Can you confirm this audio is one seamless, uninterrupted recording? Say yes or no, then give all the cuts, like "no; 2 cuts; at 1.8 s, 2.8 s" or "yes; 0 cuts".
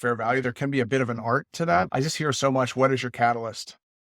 no; 1 cut; at 1.9 s